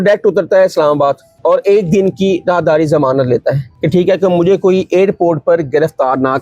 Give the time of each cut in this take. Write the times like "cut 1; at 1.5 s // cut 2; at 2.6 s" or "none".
cut 1; at 1.3 s // cut 2; at 3.7 s

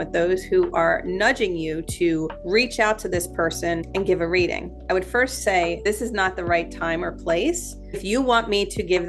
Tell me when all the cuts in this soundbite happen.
cut 1; at 2.4 s // cut 2; at 3.9 s // cut 3; at 5.8 s // cut 4; at 8.0 s

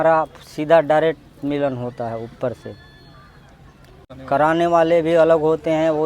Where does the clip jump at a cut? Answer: cut 1; at 4.0 s

